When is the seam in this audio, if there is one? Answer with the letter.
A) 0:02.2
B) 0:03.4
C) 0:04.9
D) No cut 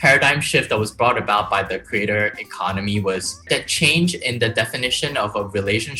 B